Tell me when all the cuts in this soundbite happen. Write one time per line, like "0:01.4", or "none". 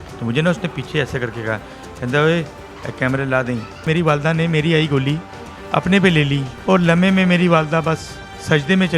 0:03.8